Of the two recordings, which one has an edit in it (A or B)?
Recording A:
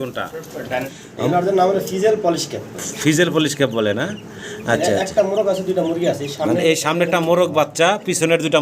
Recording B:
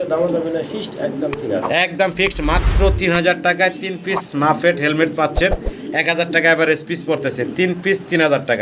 A